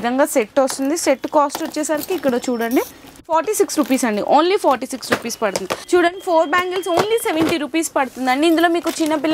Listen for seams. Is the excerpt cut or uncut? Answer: uncut